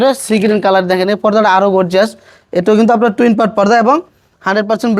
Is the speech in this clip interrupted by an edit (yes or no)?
no